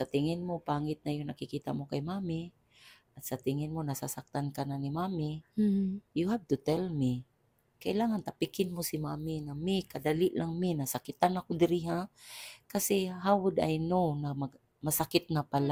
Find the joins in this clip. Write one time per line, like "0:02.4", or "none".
none